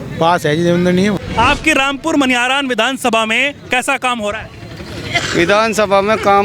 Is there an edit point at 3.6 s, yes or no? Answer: no